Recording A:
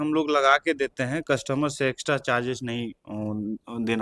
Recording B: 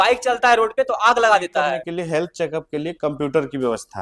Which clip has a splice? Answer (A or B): B